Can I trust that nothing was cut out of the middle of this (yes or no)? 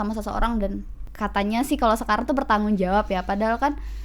no